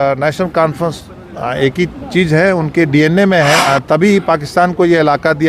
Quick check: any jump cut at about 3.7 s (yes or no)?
yes